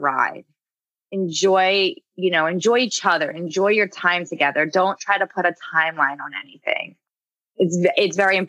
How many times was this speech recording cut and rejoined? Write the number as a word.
one